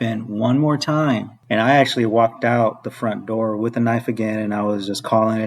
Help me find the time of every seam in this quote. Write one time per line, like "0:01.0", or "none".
0:01.3